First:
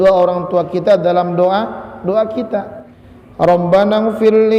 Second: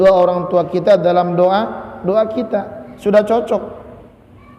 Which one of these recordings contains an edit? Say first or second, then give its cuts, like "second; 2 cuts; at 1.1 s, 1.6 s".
first; 1 cut; at 2.8 s